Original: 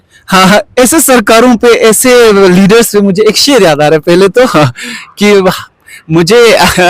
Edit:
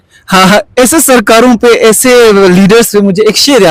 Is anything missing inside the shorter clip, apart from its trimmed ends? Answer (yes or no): no